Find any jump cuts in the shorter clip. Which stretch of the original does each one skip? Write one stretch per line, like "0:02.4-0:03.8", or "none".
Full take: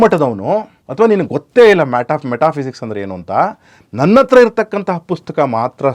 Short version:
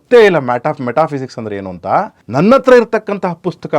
0:03.6-0:03.8